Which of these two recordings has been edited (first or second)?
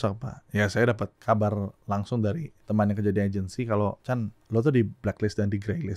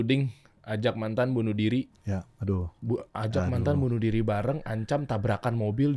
first